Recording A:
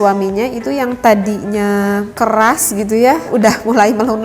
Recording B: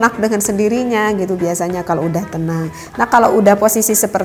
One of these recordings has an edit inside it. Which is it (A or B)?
A